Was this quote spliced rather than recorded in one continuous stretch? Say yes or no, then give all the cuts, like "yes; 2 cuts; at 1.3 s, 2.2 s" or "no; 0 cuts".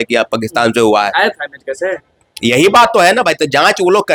no; 0 cuts